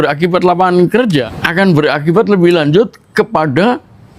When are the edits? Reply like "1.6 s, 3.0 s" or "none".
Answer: 1.4 s